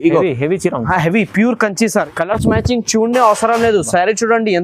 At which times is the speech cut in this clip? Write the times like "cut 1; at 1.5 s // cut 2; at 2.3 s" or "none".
cut 1; at 2.1 s